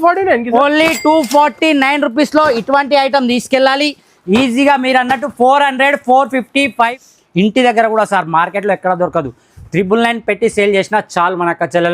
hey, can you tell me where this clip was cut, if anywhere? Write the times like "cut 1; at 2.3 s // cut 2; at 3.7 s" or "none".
cut 1; at 7.0 s